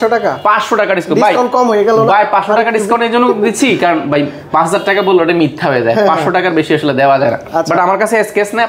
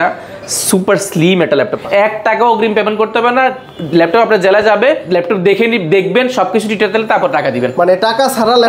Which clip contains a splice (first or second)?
second